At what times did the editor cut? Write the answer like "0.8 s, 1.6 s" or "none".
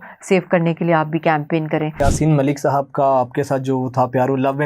2.0 s